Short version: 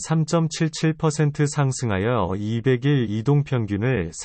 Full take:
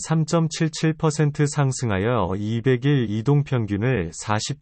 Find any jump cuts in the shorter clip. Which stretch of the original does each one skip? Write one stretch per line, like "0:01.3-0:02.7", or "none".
none